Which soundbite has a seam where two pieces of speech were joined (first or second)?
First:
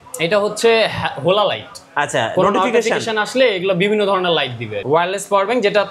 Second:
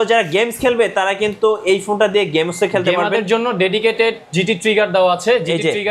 first